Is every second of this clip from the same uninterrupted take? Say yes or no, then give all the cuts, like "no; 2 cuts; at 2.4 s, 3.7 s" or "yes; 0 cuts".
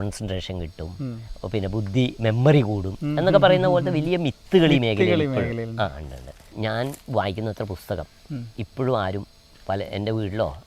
no; 2 cuts; at 1.3 s, 6.5 s